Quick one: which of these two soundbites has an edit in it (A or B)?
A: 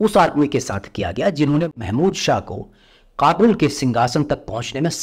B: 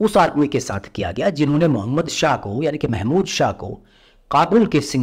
A